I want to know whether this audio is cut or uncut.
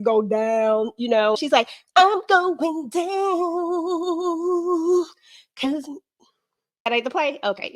cut